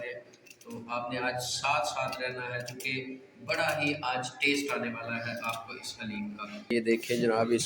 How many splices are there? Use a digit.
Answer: 1